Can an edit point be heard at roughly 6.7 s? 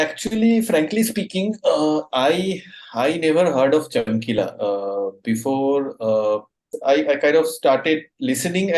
yes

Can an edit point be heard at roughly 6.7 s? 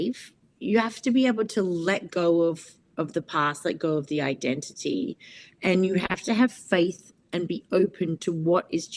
no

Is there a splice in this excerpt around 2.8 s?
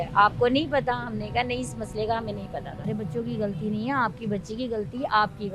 yes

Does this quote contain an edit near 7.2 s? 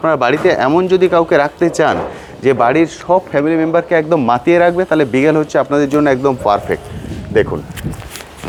no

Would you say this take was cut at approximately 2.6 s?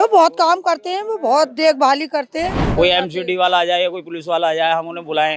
yes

